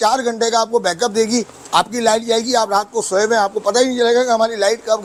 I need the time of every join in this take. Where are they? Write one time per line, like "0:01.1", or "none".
none